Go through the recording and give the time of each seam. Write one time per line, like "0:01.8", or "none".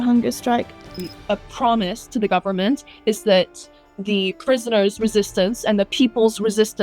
0:01.0